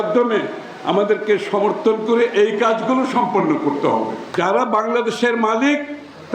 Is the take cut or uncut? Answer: cut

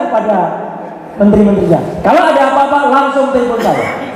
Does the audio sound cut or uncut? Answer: cut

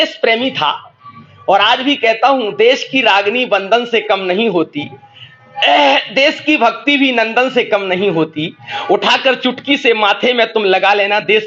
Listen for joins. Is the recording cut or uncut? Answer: uncut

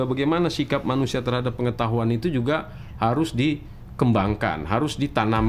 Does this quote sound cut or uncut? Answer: uncut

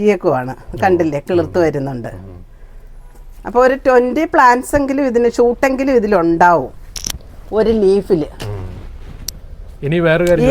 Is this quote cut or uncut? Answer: uncut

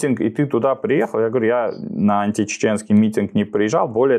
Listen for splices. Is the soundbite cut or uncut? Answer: uncut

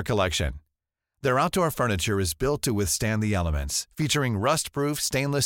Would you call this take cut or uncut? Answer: uncut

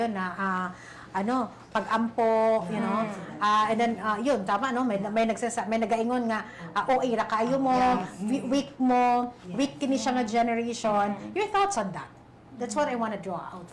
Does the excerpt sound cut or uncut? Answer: uncut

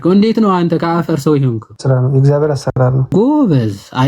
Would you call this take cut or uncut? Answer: cut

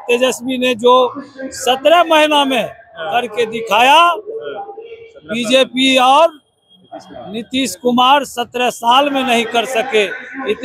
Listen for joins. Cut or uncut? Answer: uncut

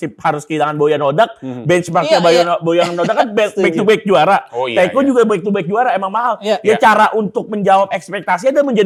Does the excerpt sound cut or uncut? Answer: uncut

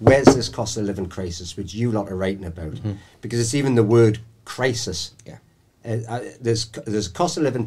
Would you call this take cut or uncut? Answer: uncut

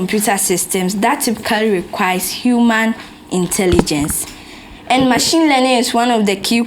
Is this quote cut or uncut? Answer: uncut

